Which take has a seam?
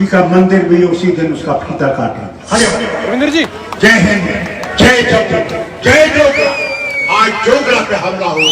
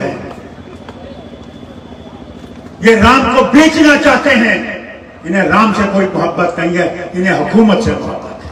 first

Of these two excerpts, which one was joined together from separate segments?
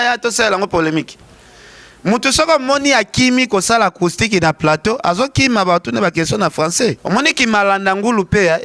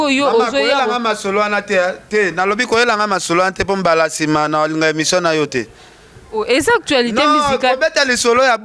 first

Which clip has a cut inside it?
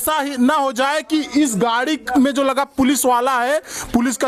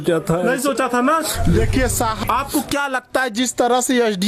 second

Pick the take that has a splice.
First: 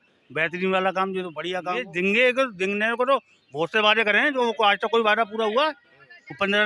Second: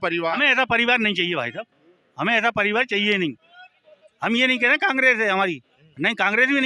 first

